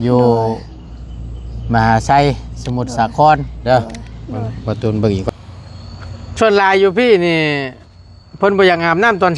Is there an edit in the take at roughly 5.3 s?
yes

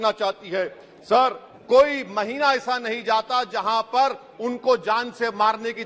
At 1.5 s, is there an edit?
yes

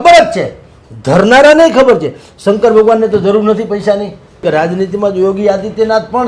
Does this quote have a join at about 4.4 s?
yes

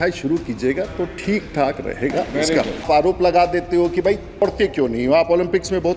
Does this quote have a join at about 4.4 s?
yes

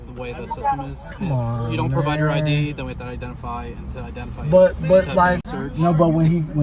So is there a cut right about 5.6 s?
yes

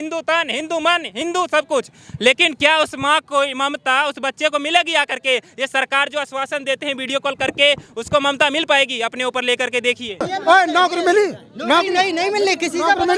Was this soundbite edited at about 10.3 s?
yes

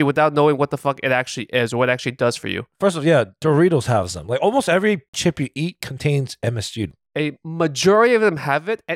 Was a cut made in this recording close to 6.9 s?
yes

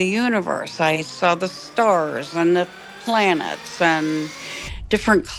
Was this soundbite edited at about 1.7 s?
no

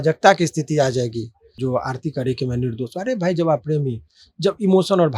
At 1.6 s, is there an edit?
yes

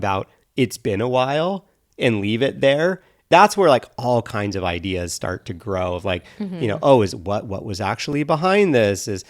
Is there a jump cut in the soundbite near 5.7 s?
no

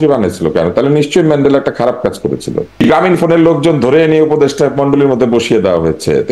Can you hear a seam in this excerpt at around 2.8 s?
yes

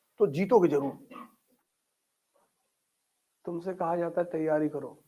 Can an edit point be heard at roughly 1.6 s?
yes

